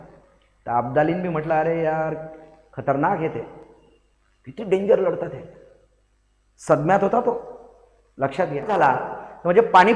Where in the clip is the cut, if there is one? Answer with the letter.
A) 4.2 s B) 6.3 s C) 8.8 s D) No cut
C